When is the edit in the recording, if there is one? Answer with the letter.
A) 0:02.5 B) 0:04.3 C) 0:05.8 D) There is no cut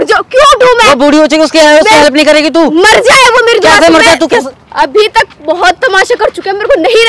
B